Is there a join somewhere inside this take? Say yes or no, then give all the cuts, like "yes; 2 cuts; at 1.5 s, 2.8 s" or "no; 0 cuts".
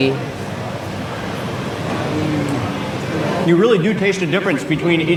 no; 0 cuts